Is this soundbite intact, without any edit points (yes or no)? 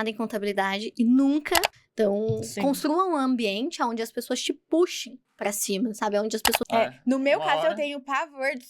no